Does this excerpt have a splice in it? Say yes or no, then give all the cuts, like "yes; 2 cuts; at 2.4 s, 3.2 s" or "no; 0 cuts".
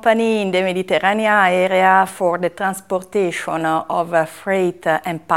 no; 0 cuts